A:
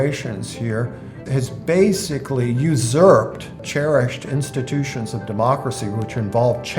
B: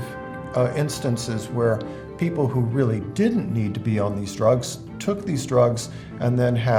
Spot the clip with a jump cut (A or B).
A